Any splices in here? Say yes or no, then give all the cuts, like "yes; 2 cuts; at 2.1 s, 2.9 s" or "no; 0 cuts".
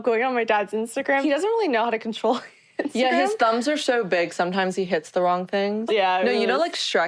yes; 2 cuts; at 1.2 s, 5.8 s